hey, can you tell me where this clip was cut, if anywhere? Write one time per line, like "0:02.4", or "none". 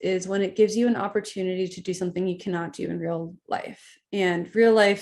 none